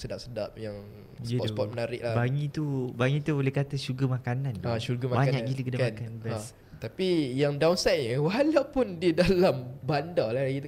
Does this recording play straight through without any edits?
yes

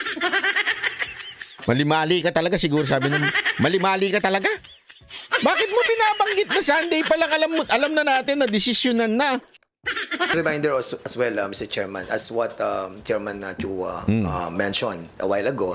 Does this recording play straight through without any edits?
no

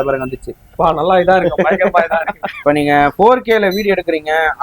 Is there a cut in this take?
yes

